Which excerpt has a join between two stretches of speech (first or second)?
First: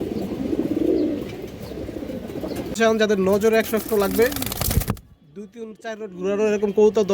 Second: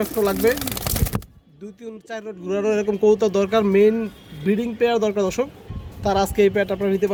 first